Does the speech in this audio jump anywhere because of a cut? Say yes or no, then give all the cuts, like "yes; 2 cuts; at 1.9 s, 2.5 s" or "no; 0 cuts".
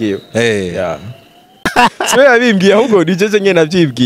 yes; 1 cut; at 1.7 s